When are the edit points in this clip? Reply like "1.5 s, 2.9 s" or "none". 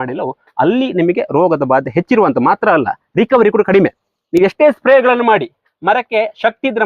none